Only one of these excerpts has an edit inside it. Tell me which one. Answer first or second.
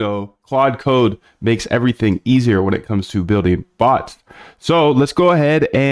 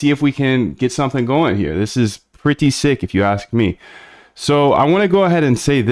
first